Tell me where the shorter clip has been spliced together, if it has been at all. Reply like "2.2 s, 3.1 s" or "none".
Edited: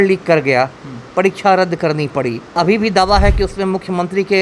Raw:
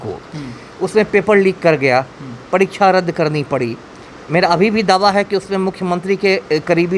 2.6 s

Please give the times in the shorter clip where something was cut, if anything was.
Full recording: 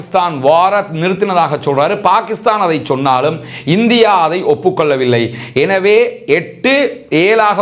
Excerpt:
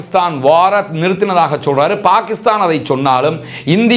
none

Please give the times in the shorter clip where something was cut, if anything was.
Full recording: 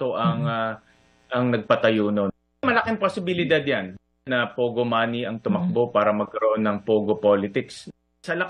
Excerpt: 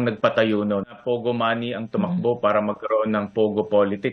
1.0 s

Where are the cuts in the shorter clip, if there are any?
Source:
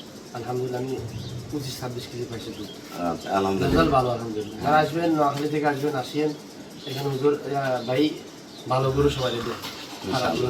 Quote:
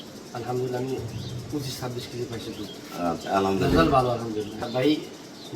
4.6 s

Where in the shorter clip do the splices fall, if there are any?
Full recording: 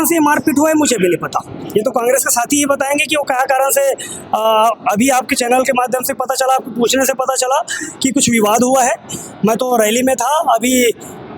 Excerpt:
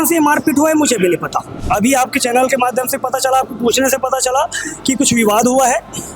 1.6 s

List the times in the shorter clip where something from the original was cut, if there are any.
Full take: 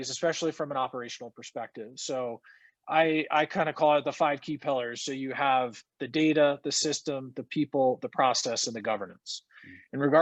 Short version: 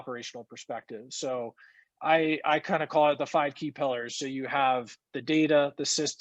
none

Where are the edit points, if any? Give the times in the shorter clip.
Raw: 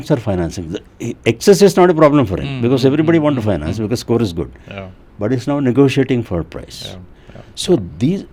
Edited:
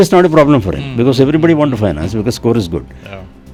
none

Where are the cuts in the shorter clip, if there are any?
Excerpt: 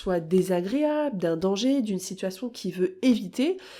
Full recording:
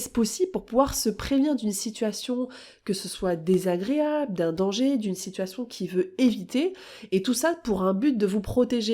none

